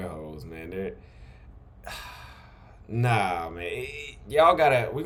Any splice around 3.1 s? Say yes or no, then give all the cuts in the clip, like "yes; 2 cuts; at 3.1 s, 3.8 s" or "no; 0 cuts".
no; 0 cuts